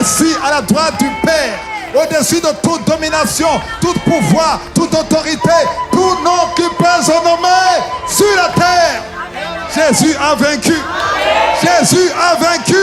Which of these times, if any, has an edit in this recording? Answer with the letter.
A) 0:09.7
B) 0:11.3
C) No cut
A